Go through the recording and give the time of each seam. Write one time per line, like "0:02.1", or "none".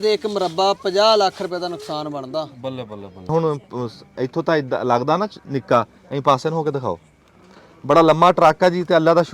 0:03.3